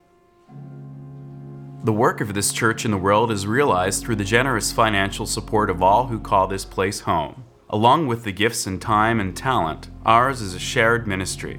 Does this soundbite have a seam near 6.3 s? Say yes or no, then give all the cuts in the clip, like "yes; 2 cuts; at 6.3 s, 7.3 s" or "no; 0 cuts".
no; 1 cut; at 1.8 s